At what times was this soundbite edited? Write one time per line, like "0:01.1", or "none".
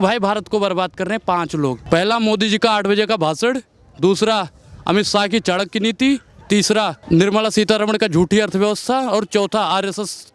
0:01.8
0:07.0